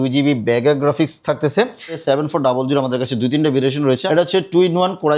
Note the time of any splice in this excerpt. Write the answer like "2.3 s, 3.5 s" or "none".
2.0 s, 4.0 s

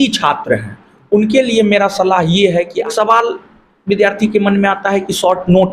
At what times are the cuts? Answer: 2.8 s

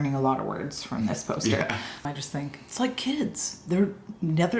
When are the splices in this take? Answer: 2.0 s

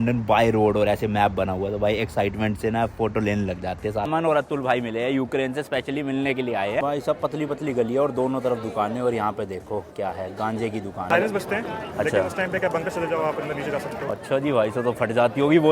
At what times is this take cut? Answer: 4.0 s, 6.8 s, 11.1 s

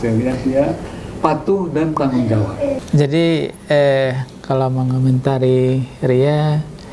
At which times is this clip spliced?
2.8 s

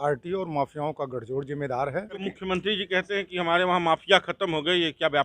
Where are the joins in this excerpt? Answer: 2.3 s

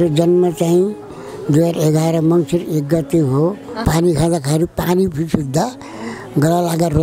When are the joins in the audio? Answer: 3.8 s

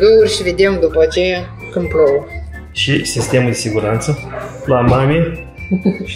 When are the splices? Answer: none

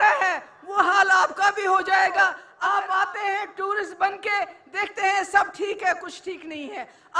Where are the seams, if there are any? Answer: 2.4 s

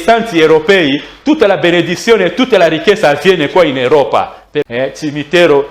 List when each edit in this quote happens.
4.7 s

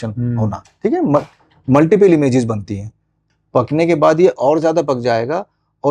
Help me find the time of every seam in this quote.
3.3 s

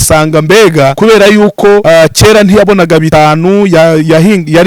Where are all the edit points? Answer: 0.9 s, 1.8 s, 3.1 s

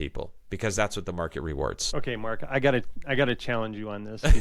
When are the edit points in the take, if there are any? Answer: 1.8 s

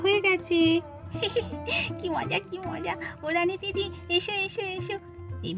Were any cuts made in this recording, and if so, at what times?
1.0 s

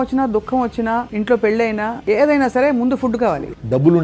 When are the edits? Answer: 1.1 s, 2.0 s, 3.3 s

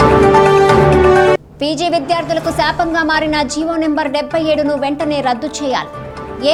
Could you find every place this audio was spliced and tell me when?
none

